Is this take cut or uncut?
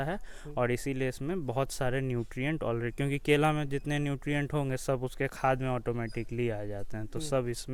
uncut